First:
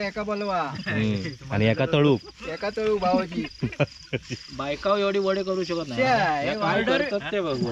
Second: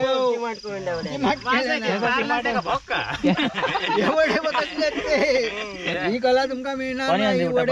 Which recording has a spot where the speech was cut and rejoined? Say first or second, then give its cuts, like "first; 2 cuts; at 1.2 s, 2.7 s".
second; 1 cut; at 5.8 s